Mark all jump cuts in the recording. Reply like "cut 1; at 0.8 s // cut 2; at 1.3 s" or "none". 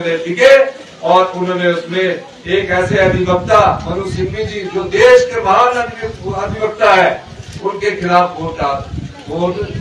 none